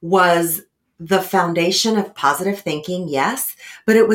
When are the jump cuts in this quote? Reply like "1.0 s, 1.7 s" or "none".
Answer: 2.1 s

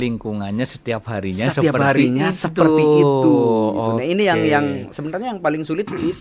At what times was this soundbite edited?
none

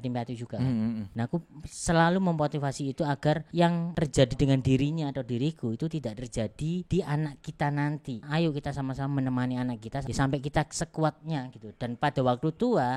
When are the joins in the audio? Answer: 1.1 s, 3.7 s, 6.8 s, 8.2 s, 10.0 s

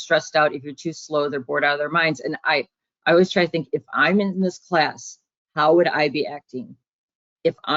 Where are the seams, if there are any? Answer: none

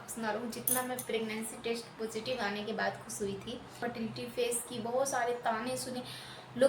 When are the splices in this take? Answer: 3.8 s

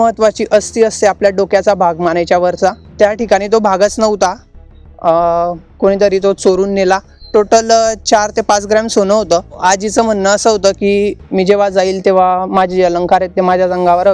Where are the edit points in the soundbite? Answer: 2.8 s, 7.1 s, 9.6 s

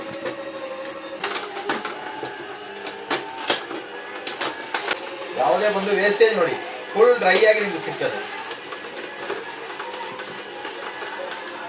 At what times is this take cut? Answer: 1.2 s, 5.1 s

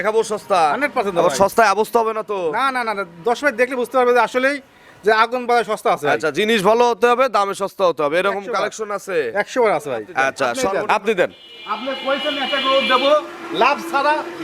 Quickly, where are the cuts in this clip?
10.6 s

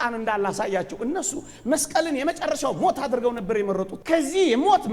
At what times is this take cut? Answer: 3.9 s

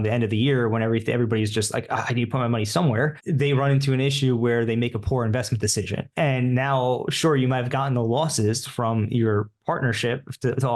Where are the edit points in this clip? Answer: 3.2 s, 6.0 s

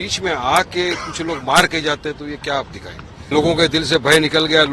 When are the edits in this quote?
3.3 s

